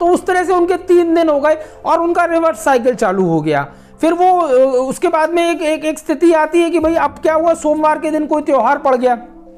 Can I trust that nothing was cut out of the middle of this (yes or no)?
yes